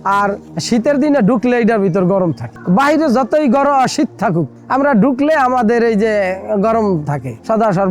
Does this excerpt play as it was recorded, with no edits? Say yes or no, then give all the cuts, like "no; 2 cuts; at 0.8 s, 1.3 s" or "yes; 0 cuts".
yes; 0 cuts